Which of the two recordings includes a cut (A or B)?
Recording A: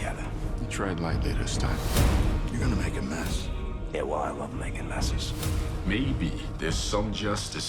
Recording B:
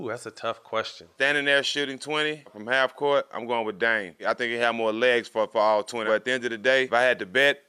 B